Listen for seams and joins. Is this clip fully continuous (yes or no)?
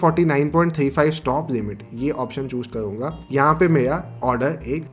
yes